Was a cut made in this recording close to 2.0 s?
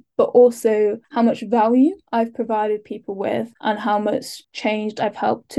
yes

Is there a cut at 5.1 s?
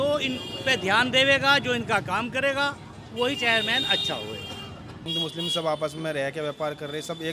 yes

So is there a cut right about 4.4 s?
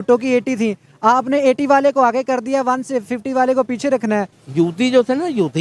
yes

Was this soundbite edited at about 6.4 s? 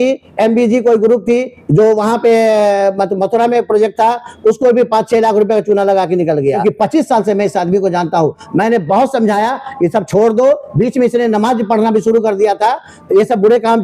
yes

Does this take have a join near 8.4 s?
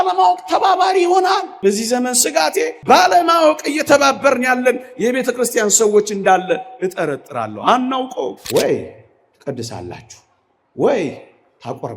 yes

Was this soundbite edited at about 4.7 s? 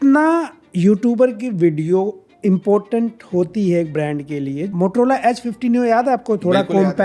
yes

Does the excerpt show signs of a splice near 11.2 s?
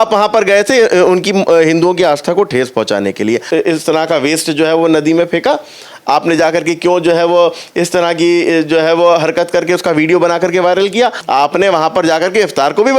yes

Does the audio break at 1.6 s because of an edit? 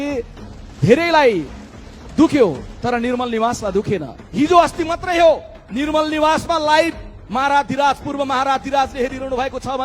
no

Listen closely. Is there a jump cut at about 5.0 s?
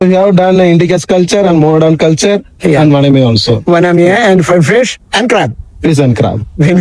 no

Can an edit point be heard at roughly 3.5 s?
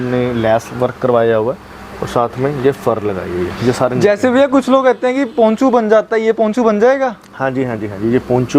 no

